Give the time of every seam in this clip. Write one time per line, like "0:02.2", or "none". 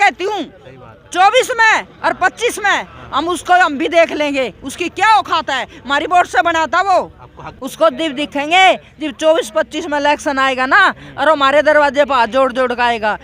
0:07.5